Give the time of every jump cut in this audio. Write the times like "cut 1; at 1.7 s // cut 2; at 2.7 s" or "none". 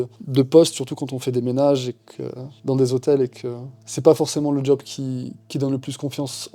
none